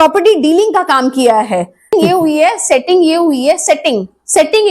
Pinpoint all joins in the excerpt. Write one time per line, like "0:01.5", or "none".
0:01.9